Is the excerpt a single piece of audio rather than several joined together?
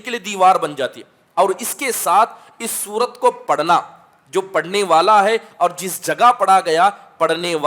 yes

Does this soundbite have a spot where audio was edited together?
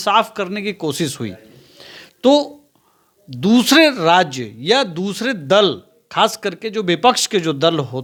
no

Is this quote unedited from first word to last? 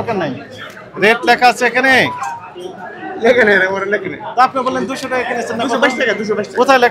yes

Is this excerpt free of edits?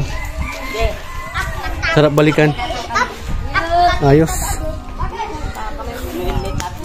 yes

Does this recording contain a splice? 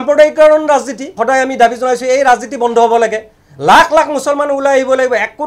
yes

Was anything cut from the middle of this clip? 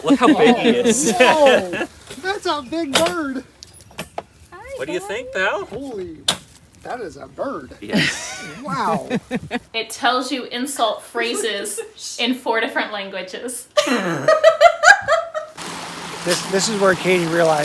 yes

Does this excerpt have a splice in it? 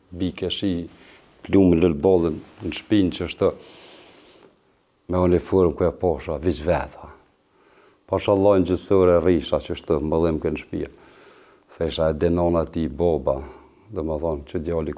no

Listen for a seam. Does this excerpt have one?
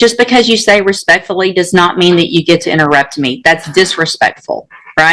no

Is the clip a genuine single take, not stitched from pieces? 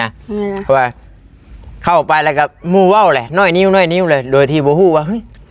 yes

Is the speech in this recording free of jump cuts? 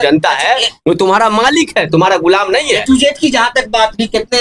yes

